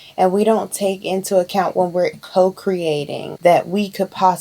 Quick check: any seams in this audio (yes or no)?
yes